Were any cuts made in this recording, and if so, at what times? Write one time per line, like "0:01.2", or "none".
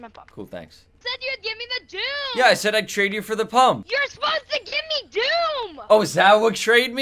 none